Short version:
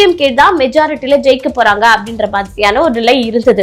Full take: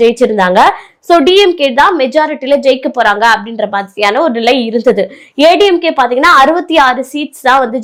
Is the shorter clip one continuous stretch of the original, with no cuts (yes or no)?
yes